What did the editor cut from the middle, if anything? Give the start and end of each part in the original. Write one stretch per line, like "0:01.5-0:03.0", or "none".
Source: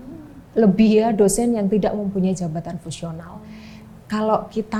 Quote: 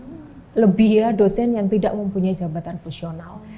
none